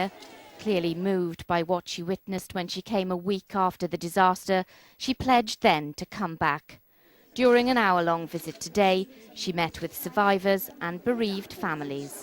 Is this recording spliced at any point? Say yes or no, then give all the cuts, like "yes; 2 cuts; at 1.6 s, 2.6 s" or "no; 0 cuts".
yes; 1 cut; at 4.9 s